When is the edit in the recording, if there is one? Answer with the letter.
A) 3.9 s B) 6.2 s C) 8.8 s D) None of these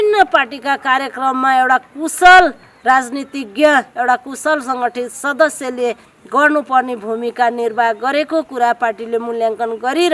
D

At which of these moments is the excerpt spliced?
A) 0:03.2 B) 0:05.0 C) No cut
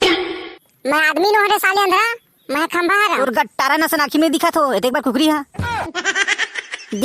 A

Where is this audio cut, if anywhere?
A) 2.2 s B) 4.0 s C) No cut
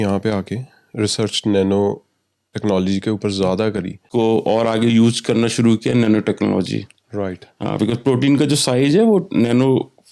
B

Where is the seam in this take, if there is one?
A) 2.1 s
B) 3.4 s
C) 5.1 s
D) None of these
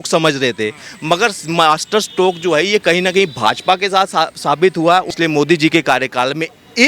C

